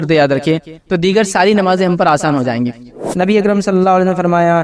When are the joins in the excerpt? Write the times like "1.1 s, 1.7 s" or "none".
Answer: 3.0 s